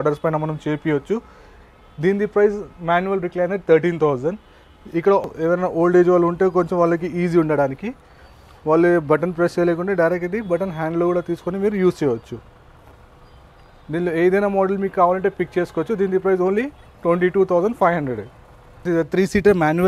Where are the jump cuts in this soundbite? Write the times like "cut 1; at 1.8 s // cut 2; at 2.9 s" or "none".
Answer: cut 1; at 5.2 s // cut 2; at 18.8 s